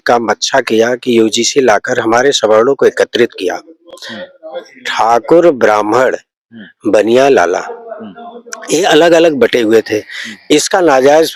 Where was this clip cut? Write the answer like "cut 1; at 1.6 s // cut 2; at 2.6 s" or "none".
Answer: none